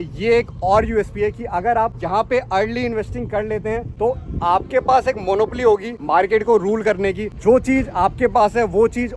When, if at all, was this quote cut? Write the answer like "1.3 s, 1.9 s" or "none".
2.0 s, 3.9 s, 5.9 s, 7.3 s